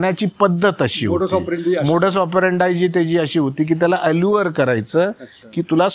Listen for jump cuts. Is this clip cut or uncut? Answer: uncut